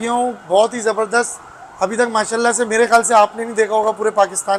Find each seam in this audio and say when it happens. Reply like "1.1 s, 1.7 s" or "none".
none